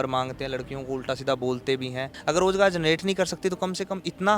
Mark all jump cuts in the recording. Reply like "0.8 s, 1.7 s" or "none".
2.1 s